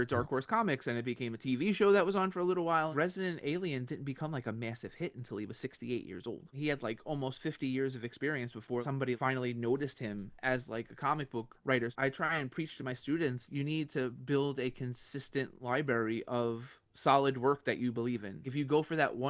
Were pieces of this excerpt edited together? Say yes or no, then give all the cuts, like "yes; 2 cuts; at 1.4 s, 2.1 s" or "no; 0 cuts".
yes; 6 cuts; at 2.9 s, 6.6 s, 9.0 s, 11.9 s, 13.4 s, 18.5 s